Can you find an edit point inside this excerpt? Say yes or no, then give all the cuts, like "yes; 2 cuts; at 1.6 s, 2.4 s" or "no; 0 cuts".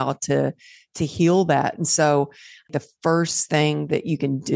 yes; 1 cut; at 2.7 s